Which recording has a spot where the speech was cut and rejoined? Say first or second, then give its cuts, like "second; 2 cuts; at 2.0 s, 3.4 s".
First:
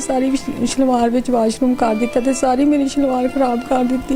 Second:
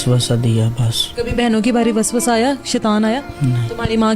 second; 2 cuts; at 1.0 s, 3.3 s